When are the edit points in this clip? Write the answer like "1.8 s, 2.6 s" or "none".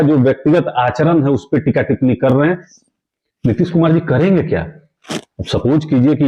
2.7 s